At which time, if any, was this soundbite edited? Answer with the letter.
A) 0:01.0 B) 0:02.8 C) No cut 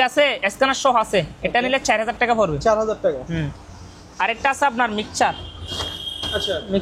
C